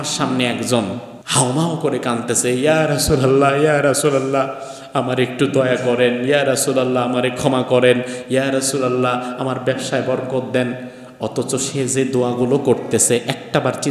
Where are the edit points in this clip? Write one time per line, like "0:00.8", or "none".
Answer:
0:01.1